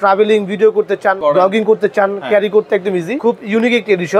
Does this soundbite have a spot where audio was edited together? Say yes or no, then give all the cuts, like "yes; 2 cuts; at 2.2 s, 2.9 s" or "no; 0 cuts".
yes; 2 cuts; at 1.2 s, 3.2 s